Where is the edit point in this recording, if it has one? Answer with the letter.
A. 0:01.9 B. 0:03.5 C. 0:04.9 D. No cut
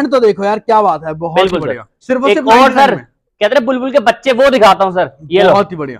A